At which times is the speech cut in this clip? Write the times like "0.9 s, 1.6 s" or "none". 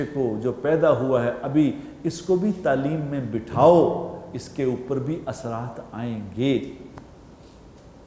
none